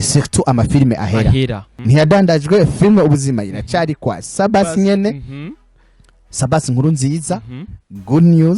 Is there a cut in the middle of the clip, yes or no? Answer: yes